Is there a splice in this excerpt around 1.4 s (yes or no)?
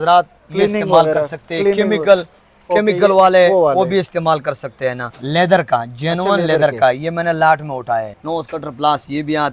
no